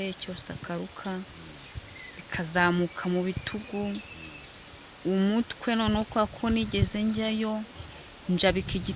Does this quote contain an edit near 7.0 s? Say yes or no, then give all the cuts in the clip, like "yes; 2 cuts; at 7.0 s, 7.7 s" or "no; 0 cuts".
no; 0 cuts